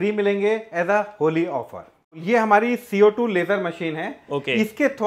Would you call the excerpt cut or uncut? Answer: uncut